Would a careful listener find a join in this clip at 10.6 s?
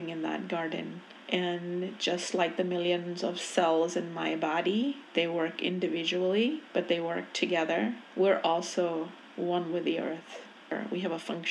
yes; 1 cut; at 10.6 s

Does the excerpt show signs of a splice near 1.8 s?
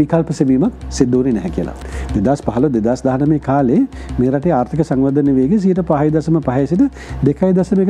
yes; 1 cut; at 1.8 s

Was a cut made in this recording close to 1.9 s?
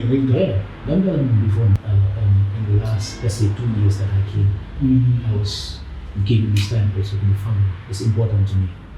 yes; 1 cut; at 1.9 s

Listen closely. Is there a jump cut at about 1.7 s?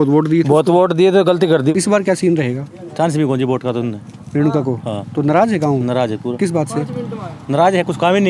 yes; 1 cut; at 1.7 s

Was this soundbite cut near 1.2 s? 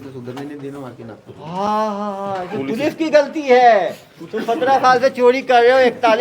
no; 0 cuts

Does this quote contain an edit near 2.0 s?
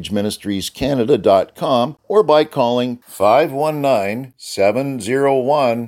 yes; 1 cut; at 2.0 s

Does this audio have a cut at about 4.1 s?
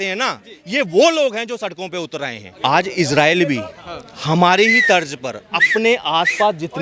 no; 1 cut; at 2.4 s

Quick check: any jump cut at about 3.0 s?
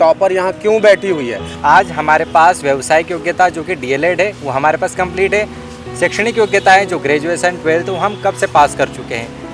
no; 1 cut; at 1.4 s

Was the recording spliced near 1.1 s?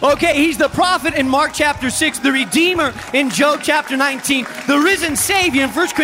yes; 2 cuts; at 1.1 s, 3.3 s

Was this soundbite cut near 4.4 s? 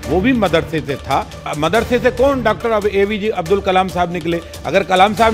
no; 1 cut; at 1.5 s

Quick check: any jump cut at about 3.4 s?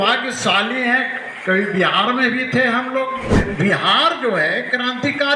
yes; 1 cut; at 3.4 s

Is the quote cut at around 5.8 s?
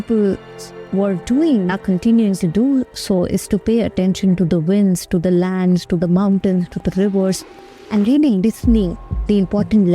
no; 1 cut; at 1.8 s

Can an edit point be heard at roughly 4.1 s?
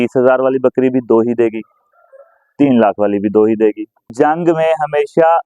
yes; 1 cut; at 4.1 s

